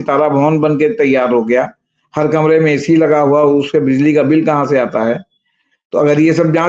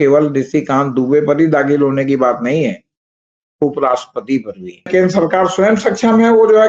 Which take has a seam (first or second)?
second